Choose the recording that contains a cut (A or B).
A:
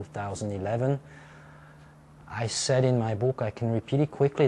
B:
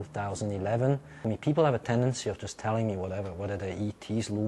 B